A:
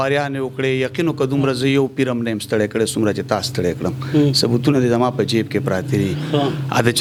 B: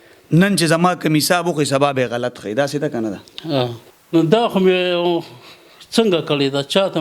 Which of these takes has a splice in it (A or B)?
B